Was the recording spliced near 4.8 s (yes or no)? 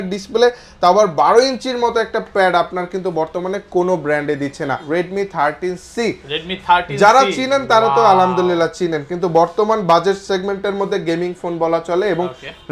yes